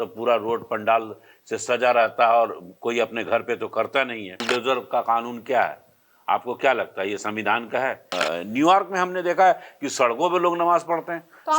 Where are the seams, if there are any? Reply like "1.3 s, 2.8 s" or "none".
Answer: 4.4 s, 8.1 s